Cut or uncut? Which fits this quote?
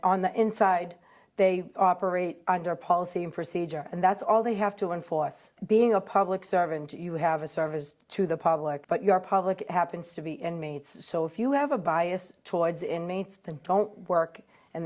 uncut